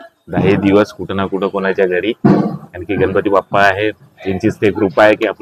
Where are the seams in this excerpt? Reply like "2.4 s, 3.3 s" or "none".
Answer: none